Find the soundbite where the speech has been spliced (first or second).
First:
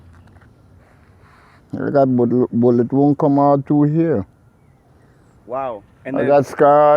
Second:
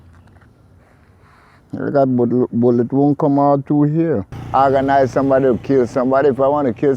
second